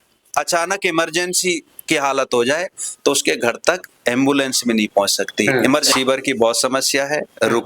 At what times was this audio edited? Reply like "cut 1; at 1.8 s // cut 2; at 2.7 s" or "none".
cut 1; at 5.9 s

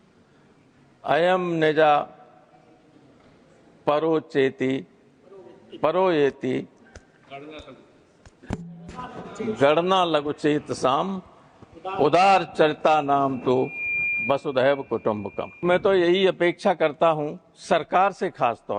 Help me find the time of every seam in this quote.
cut 1; at 15.6 s

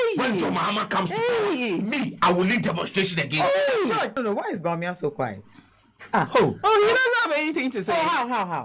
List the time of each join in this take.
cut 1; at 4.2 s

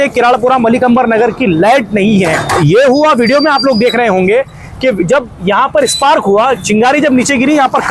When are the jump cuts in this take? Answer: cut 1; at 2.5 s

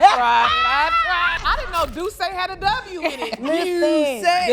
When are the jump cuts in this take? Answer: cut 1; at 1.4 s

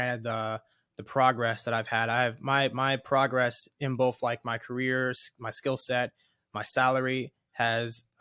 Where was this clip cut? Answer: none

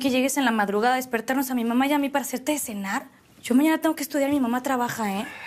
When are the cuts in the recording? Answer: cut 1; at 0.9 s

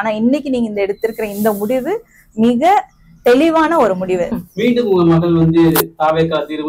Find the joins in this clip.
cut 1; at 4.3 s

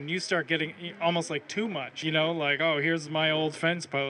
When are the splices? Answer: cut 1; at 2.0 s

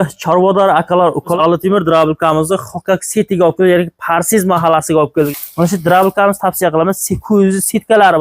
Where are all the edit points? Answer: cut 1; at 1.3 s // cut 2; at 5.3 s

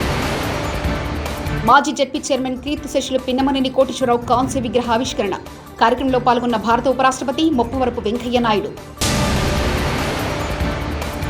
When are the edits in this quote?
cut 1; at 1.2 s

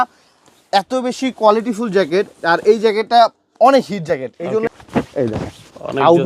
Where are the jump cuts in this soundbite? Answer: cut 1; at 4.6 s

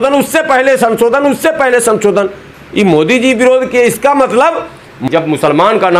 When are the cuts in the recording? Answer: cut 1; at 5.1 s

